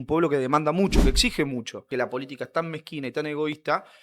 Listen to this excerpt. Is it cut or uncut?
cut